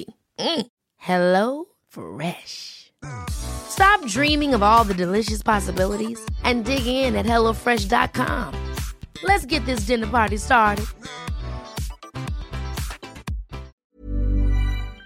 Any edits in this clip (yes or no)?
yes